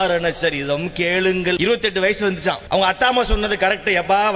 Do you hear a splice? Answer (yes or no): yes